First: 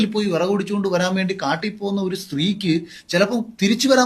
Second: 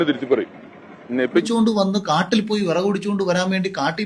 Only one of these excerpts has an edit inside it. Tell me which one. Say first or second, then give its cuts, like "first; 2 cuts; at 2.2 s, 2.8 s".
second; 1 cut; at 1.4 s